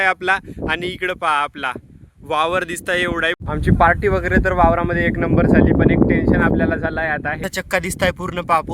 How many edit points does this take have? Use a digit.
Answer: 2